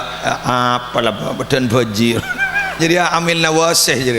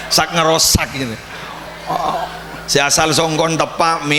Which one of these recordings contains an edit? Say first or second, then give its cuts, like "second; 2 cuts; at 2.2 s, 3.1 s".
first; 1 cut; at 2.8 s